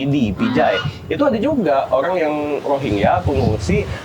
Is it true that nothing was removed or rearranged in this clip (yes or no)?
yes